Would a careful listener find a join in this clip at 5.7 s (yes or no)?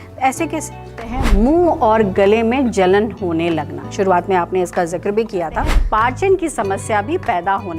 yes